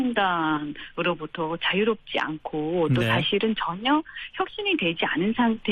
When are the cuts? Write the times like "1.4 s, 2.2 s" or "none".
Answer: 1.6 s